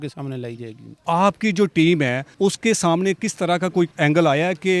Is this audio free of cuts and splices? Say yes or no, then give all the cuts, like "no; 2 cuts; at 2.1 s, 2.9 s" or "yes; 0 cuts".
no; 3 cuts; at 0.9 s, 2.2 s, 3.9 s